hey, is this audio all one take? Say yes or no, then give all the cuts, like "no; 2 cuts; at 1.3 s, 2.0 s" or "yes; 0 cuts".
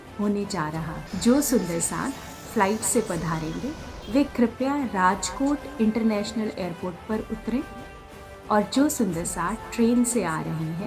no; 1 cut; at 1.0 s